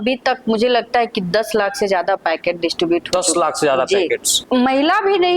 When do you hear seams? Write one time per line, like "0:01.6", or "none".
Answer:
0:04.3